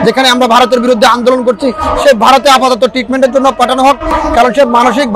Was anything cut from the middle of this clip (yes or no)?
yes